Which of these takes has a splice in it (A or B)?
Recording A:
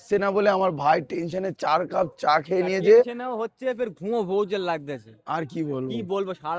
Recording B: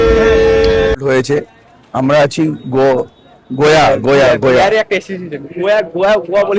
B